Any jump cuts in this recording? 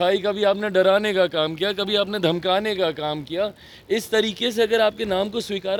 no; 0 cuts

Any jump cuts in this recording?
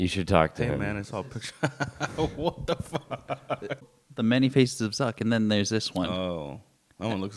yes; 1 cut; at 3.9 s

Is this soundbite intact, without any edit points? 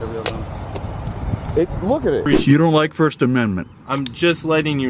no; 1 cut; at 2.2 s

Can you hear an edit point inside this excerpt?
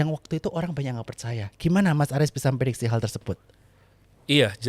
no; 0 cuts

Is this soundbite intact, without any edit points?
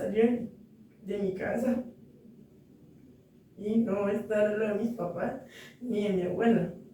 yes; 0 cuts

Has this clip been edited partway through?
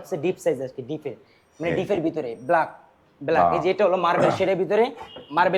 no; 0 cuts

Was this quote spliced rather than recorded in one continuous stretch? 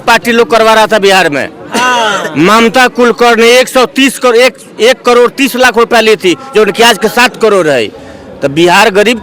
no; 0 cuts

